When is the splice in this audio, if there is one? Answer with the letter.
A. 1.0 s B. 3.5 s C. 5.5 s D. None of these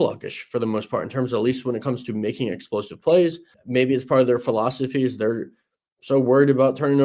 B